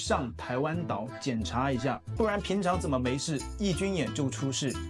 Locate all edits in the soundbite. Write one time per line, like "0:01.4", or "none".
0:02.0